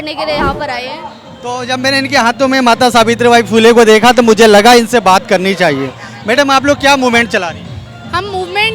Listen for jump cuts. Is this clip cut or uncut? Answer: cut